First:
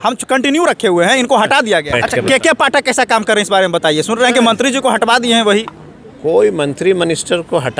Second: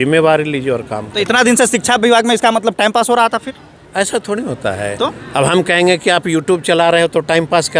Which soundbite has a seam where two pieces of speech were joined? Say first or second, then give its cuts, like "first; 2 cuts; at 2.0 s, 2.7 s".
first; 1 cut; at 2.0 s